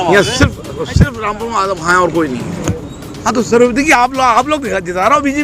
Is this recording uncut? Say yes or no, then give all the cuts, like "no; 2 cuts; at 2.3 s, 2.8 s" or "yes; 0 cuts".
no; 1 cut; at 2.6 s